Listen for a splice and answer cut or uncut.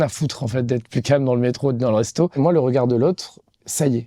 cut